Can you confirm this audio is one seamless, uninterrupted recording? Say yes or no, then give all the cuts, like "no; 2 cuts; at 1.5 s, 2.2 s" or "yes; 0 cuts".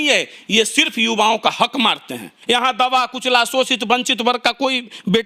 no; 1 cut; at 2.3 s